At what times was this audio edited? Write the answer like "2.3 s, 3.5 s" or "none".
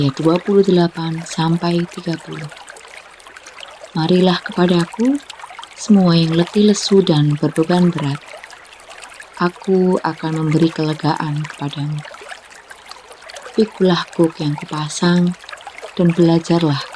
2.5 s, 3.9 s